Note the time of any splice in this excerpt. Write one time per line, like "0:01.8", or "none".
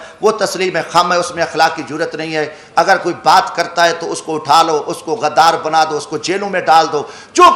none